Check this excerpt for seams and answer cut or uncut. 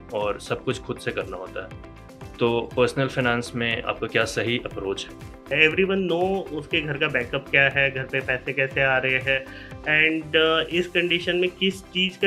cut